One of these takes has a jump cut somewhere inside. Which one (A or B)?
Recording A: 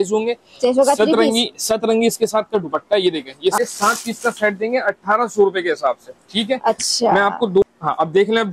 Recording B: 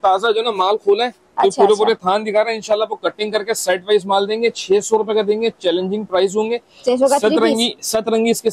A